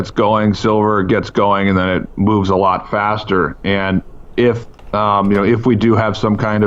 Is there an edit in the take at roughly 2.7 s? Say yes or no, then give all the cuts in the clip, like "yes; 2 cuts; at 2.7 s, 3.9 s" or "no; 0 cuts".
no; 1 cut; at 4.7 s